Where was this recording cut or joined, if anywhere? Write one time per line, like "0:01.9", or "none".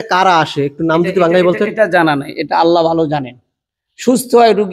none